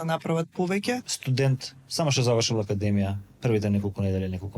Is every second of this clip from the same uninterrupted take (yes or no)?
no